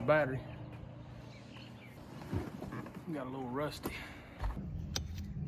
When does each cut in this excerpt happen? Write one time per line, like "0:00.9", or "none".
0:02.0
0:04.6